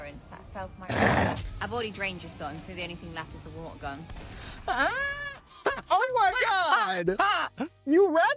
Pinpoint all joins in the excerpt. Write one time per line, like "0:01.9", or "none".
0:01.5